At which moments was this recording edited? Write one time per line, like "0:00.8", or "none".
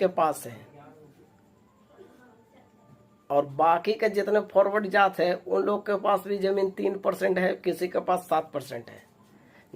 0:06.8

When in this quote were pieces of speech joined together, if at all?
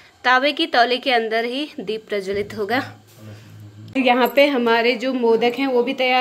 0:03.8

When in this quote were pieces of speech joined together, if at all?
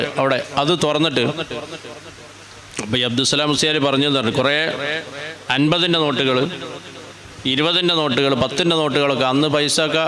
none

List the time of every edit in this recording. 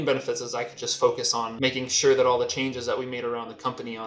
none

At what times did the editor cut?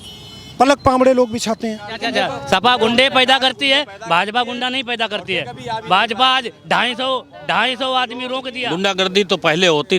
0:02.0
0:08.6

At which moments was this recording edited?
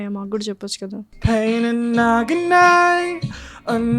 0:01.1

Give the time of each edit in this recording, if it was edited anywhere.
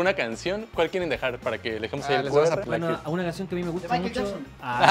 0:02.6

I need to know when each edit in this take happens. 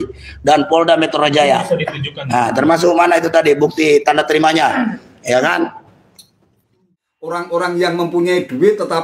0:06.9

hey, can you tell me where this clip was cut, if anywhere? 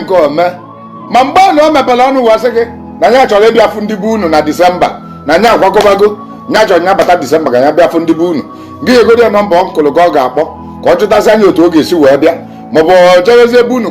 0:00.9

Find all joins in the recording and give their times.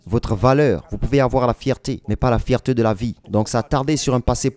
0:03.2

